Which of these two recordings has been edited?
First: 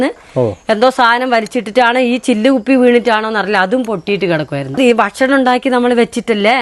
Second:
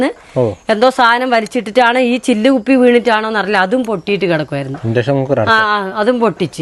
first; 1 cut; at 4.8 s

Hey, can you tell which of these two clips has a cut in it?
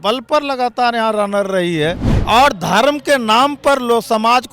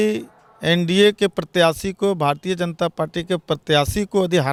first; 1 cut; at 2.1 s

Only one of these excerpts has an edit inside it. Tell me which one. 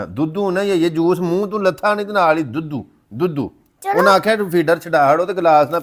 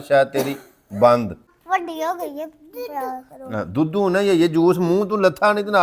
second; 1 cut; at 1.5 s

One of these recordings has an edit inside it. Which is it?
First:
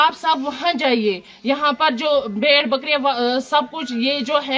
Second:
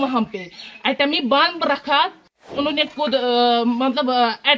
second; 1 cut; at 2.4 s

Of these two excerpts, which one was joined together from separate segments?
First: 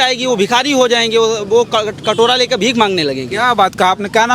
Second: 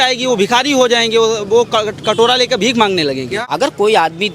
second; 1 cut; at 3.3 s

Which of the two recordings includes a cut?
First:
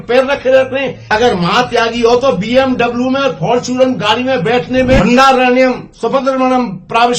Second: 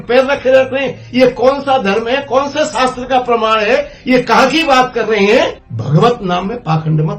first; 2 cuts; at 1.0 s, 5.0 s

